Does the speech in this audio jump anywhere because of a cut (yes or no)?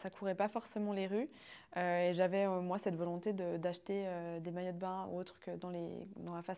no